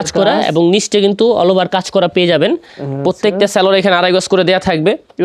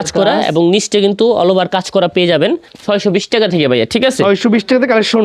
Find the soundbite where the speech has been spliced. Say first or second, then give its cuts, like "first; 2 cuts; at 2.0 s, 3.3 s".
second; 1 cut; at 2.7 s